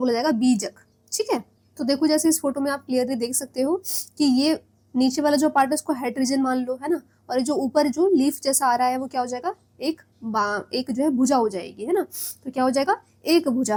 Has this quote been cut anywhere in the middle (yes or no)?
no